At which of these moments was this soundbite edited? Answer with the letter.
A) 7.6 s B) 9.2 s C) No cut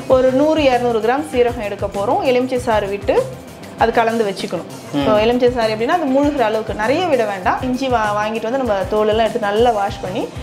A